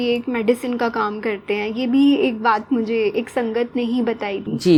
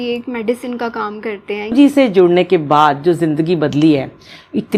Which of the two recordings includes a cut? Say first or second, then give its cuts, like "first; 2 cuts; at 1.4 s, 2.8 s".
second; 1 cut; at 1.7 s